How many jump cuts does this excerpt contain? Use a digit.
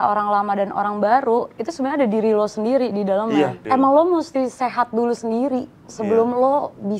1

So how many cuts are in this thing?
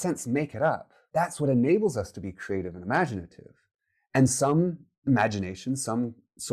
1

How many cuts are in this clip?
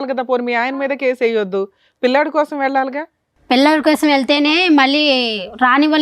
0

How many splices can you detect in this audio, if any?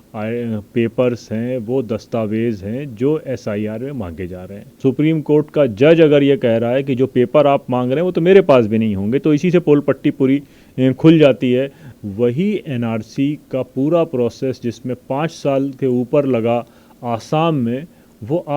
2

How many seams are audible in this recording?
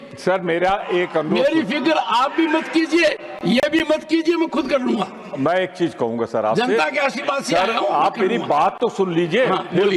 0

